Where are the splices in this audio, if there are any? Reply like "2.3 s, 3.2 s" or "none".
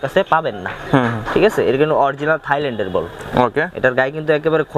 none